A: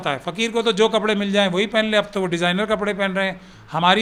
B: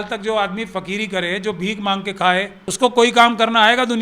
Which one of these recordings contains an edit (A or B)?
B